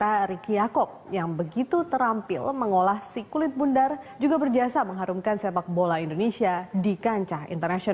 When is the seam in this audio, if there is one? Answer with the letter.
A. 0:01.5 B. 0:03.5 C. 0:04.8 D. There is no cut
D